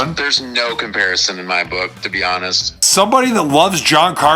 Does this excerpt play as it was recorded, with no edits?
no; 1 cut; at 2.8 s

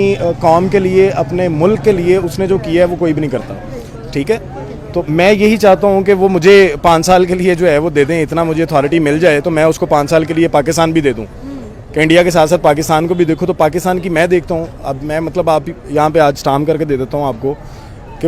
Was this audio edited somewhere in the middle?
no; 0 cuts

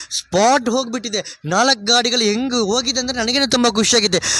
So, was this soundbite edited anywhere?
no; 0 cuts

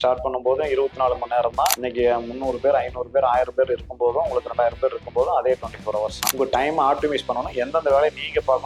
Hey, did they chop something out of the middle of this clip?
yes; 2 cuts; at 1.8 s, 6.2 s

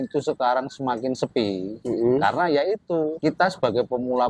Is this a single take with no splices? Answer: no; 2 cuts; at 1.7 s, 3.1 s

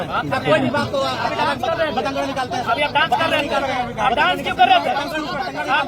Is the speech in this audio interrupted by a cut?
no; 0 cuts

